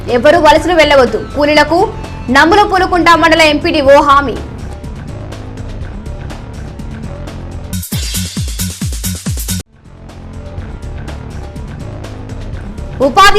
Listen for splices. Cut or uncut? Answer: cut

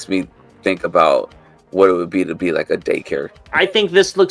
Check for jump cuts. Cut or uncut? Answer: cut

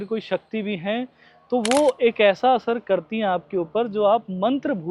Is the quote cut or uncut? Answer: uncut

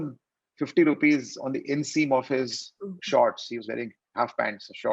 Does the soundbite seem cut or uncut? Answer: uncut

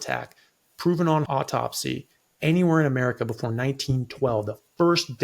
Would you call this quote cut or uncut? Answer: cut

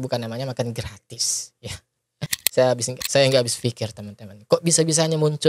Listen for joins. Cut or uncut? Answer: cut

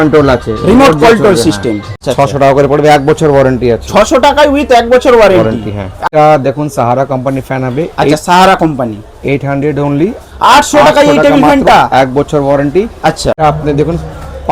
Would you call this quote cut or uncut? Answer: cut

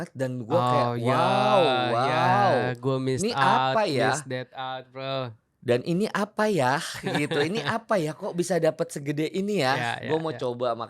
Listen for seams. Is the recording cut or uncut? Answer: uncut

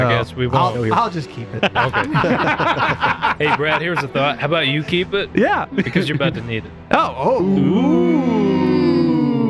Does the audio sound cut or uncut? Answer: uncut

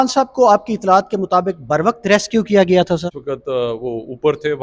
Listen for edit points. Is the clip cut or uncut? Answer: cut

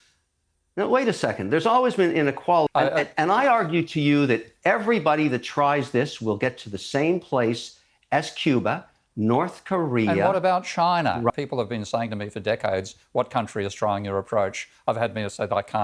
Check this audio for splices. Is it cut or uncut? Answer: cut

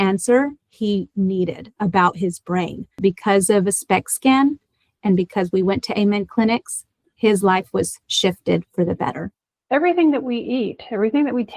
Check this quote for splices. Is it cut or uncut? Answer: cut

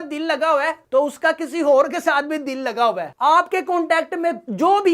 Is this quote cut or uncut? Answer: cut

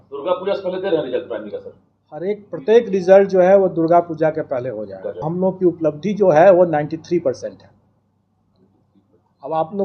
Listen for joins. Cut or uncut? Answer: cut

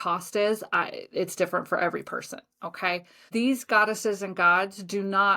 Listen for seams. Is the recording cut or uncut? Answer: cut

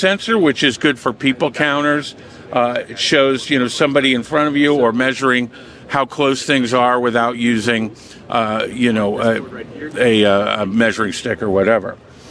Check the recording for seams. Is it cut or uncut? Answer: uncut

